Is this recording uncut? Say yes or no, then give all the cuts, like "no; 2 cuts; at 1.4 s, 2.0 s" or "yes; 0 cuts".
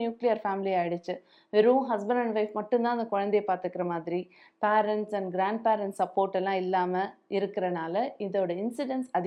yes; 0 cuts